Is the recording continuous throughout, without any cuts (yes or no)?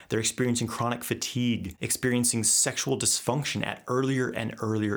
no